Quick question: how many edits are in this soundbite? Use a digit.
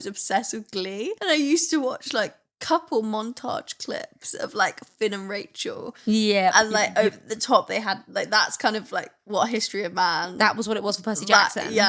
1